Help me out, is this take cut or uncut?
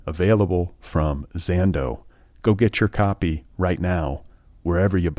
uncut